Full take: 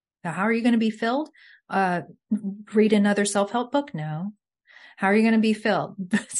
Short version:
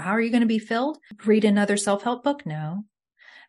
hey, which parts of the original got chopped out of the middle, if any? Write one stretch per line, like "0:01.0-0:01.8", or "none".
0:01.4-0:02.6